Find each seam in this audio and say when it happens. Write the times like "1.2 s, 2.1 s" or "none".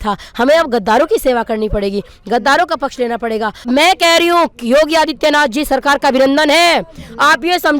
3.6 s